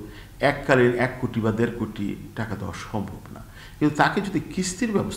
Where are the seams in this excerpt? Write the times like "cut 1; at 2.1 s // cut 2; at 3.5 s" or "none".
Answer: none